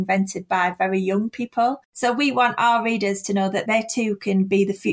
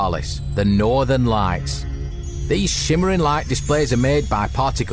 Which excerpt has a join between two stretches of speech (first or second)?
first